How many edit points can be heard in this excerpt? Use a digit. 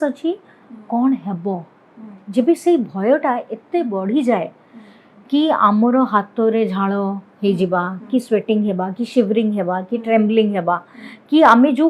0